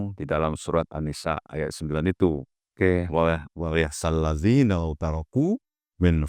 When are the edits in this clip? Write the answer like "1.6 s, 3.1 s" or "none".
none